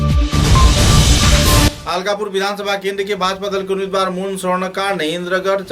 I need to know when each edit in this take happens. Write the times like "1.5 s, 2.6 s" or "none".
1.7 s